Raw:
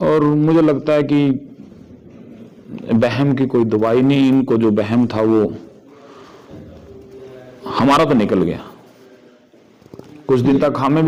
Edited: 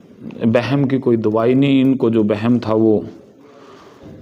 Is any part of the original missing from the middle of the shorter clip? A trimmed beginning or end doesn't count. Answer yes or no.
no